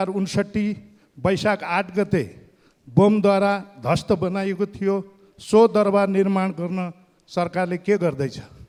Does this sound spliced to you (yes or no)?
no